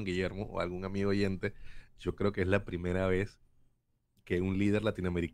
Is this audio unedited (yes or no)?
yes